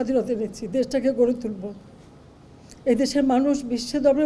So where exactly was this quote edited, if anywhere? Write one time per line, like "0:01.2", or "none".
none